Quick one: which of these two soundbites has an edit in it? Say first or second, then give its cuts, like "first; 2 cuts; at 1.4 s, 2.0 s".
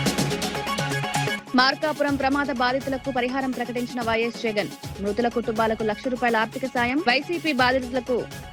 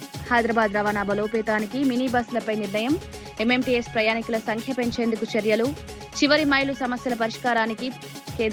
first; 1 cut; at 1.3 s